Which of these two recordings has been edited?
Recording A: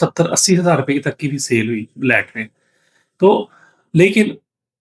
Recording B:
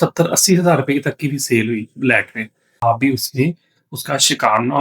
B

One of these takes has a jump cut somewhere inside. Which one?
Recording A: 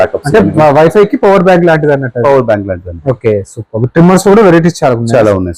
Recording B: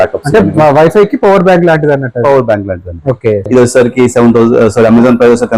B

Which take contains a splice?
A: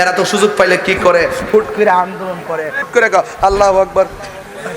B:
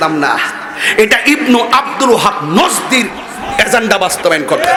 A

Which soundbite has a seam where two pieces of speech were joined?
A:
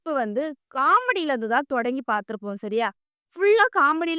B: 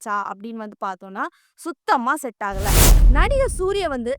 B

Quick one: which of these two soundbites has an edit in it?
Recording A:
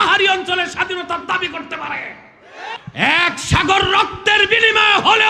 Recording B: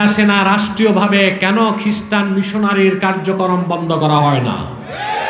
A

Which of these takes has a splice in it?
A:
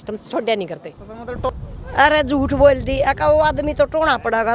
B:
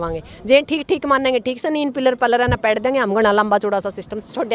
A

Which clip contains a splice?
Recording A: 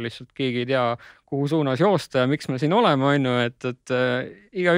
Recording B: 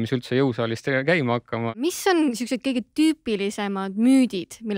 B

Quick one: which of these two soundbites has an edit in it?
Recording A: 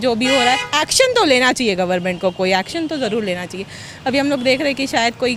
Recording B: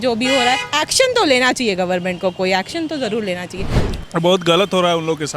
B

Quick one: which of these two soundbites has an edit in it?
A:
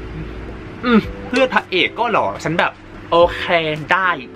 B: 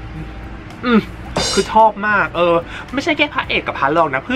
A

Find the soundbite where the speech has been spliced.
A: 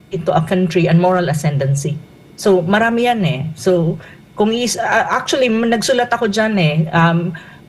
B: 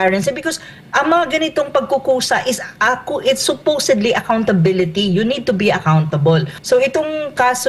B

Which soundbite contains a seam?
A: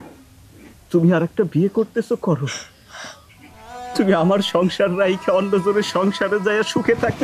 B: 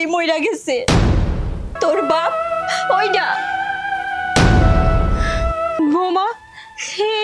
B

